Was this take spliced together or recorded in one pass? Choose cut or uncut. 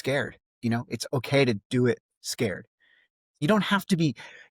cut